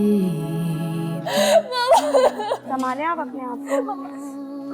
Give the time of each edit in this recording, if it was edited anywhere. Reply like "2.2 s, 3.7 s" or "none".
1.1 s